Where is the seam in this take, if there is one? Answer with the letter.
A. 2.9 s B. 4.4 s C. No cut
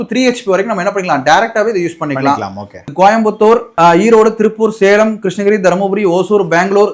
A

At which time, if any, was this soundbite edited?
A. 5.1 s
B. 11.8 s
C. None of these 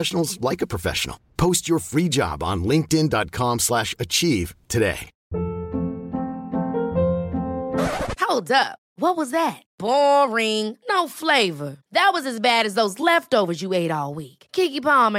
A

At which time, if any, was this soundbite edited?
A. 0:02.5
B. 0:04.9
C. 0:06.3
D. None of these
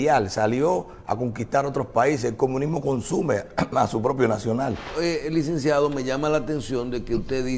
B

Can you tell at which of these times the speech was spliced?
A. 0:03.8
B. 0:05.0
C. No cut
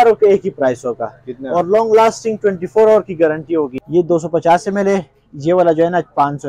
A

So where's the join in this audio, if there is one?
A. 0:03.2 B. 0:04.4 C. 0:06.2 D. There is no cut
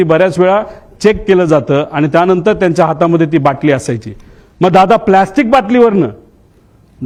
D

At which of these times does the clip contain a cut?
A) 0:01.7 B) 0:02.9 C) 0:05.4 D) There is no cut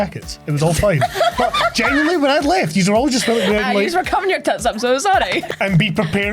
C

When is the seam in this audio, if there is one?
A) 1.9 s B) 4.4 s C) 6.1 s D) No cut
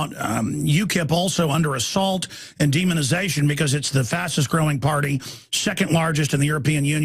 C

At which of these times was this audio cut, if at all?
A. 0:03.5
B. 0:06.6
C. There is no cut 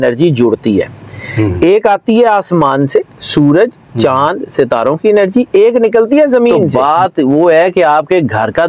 B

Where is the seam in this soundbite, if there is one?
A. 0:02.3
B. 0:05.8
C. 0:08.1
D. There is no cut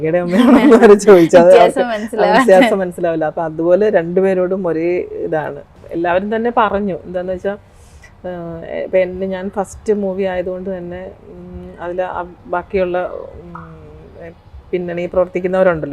B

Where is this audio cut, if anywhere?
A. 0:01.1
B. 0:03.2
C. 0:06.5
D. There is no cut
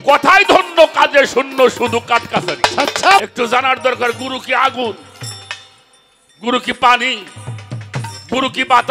B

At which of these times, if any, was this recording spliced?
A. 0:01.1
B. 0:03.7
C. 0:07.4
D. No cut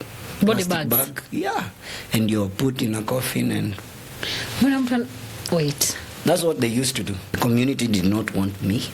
C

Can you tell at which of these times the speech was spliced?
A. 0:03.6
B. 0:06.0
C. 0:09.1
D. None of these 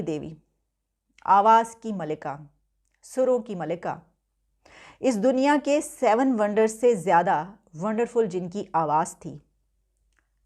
D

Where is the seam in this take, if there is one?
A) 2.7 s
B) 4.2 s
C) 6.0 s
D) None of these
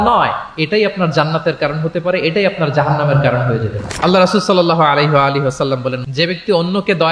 C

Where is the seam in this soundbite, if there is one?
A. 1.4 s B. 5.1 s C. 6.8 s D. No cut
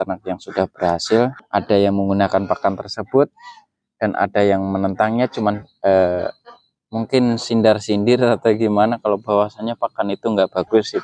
A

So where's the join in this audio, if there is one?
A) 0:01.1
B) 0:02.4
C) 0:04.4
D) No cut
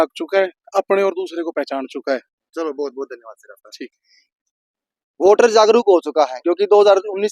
D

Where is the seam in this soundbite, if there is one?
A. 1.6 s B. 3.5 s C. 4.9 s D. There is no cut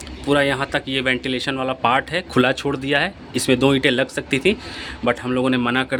D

